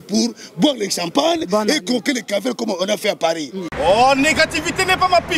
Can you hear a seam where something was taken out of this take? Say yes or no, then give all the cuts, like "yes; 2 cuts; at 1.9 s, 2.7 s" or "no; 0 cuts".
yes; 1 cut; at 3.6 s